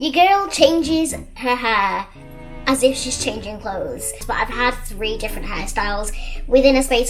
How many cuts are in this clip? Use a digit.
0